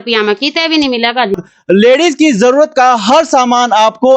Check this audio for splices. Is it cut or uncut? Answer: cut